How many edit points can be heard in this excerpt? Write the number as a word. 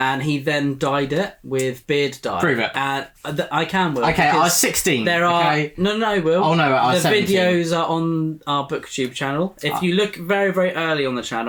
zero